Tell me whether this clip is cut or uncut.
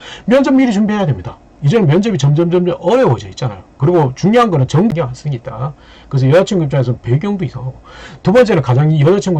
cut